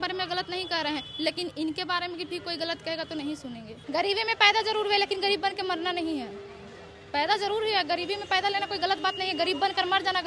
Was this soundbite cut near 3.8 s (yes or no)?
yes